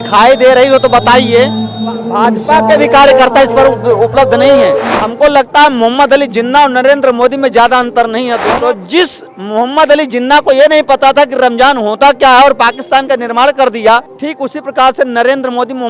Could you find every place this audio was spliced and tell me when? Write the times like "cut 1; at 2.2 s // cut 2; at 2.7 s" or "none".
cut 1; at 2.0 s // cut 2; at 5.0 s // cut 3; at 8.4 s // cut 4; at 14.2 s